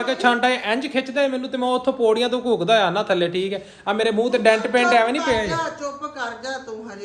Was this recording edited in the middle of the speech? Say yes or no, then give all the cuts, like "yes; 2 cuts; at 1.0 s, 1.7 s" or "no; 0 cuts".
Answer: no; 0 cuts